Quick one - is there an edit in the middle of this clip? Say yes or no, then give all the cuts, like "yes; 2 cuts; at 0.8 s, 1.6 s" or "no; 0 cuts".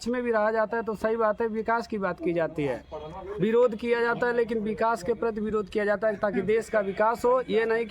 no; 0 cuts